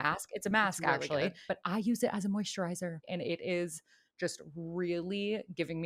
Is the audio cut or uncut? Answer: cut